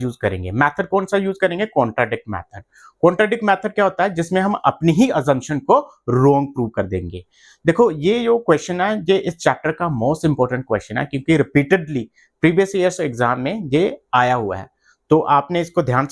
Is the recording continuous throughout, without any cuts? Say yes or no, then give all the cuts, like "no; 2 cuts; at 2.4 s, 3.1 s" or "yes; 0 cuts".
yes; 0 cuts